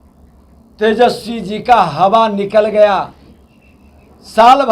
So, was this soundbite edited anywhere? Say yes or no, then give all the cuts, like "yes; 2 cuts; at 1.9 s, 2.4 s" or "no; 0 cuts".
no; 0 cuts